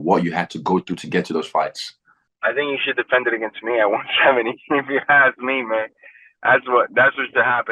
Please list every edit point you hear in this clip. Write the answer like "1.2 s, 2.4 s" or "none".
2.1 s